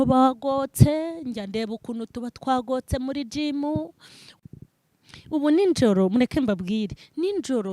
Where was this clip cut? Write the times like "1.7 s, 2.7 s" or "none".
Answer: 4.3 s